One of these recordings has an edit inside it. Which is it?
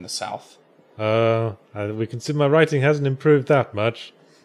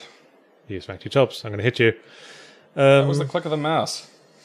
second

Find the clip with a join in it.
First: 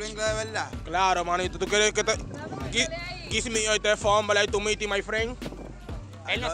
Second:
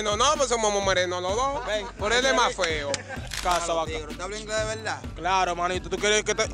second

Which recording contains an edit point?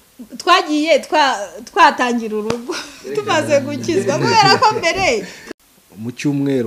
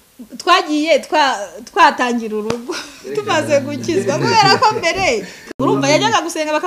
first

